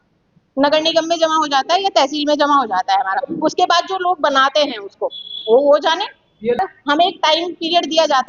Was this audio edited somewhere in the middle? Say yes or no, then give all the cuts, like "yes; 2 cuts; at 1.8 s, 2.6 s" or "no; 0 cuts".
yes; 1 cut; at 6.6 s